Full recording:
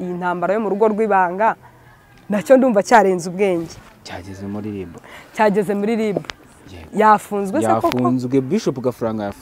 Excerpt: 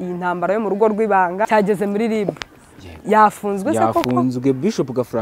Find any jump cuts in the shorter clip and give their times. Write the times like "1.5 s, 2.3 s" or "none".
1.4 s